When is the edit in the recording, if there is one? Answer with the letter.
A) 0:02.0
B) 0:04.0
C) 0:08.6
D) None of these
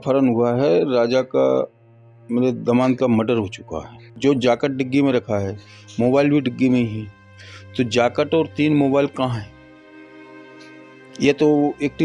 B